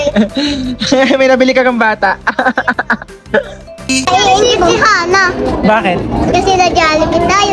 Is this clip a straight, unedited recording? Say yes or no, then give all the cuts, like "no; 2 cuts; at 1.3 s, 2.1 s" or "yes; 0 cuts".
no; 1 cut; at 3.9 s